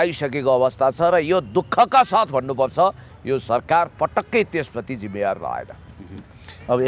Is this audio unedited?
yes; 0 cuts

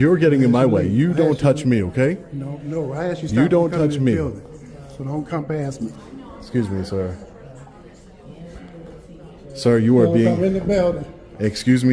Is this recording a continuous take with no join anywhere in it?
yes; 0 cuts

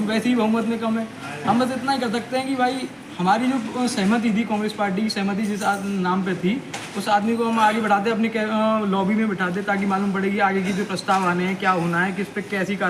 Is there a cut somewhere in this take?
no; 0 cuts

